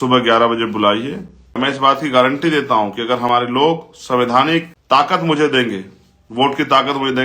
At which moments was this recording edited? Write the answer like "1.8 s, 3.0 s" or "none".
1.6 s, 4.7 s